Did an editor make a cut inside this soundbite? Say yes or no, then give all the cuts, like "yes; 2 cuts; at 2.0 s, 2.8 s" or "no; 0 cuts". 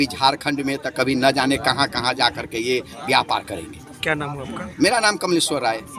no; 0 cuts